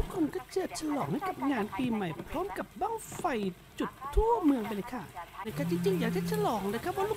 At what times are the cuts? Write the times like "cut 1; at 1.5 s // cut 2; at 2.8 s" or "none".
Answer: cut 1; at 5.5 s